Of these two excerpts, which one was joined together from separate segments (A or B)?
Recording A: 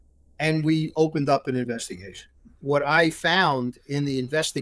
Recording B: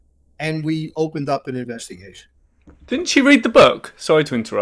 A